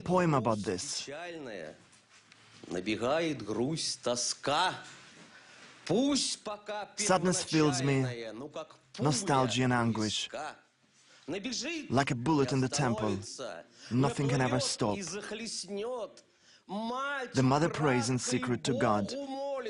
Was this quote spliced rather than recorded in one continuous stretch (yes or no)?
yes